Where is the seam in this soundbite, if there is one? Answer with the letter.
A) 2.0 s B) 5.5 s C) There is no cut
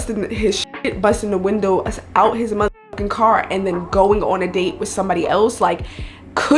C